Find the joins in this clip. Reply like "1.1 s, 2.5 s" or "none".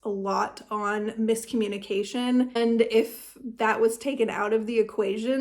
2.6 s